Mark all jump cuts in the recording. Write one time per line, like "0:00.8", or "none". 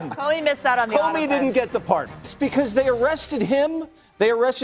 0:02.3

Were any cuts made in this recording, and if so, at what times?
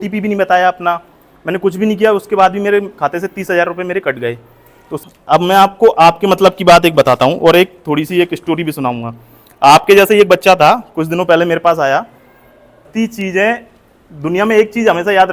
0:05.0
0:12.9

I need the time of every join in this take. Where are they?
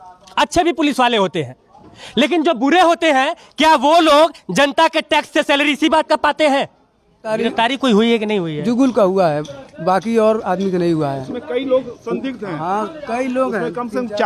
0:07.3

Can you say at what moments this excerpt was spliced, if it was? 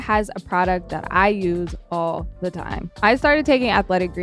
0:02.9

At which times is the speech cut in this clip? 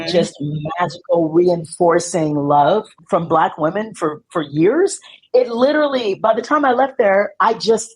0:03.0

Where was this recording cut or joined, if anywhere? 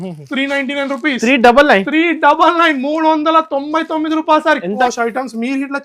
0:04.8

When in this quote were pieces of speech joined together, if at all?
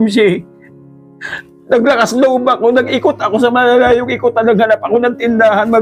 none

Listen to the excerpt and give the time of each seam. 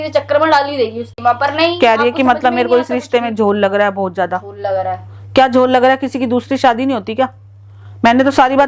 none

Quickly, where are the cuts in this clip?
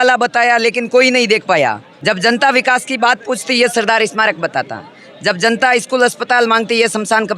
0:01.9

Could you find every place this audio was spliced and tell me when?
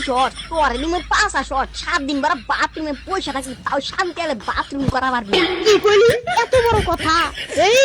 0:05.4

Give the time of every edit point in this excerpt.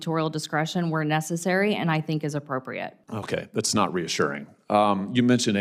0:03.0
0:04.5

